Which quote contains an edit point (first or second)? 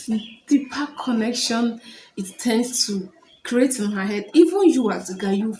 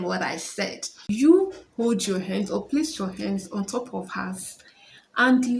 second